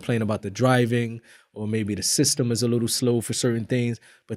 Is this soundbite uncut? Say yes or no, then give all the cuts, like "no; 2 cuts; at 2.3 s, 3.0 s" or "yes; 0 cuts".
yes; 0 cuts